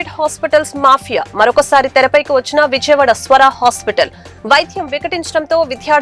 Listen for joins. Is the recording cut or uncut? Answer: uncut